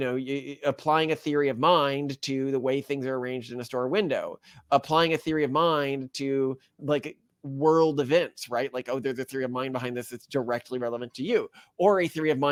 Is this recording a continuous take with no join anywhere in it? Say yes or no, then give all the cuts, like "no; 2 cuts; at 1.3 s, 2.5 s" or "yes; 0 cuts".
yes; 0 cuts